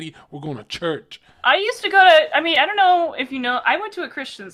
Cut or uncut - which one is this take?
uncut